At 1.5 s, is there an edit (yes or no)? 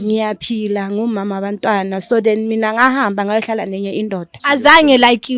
no